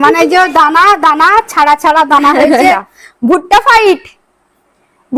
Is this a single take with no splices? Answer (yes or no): no